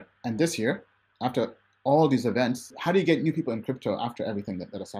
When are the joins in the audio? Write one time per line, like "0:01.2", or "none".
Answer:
none